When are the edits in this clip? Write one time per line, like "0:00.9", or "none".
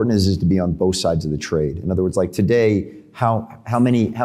none